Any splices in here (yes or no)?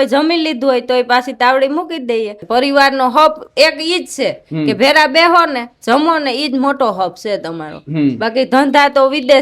yes